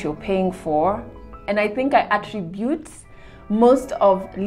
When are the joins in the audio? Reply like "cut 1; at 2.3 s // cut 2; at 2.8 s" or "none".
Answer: cut 1; at 1.4 s